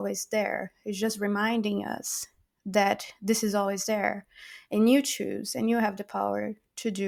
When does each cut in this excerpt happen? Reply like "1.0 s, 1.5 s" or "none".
none